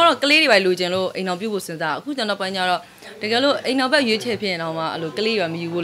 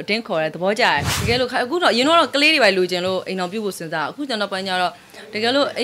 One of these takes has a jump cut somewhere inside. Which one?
second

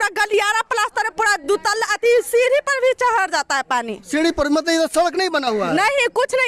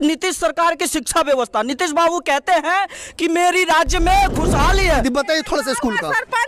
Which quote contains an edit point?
second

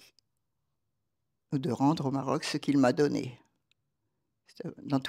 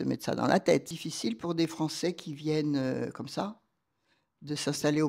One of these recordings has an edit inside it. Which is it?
second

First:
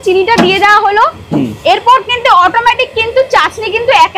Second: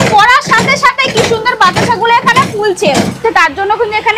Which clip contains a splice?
second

